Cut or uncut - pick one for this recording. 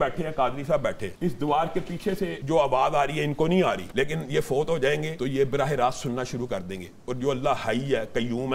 cut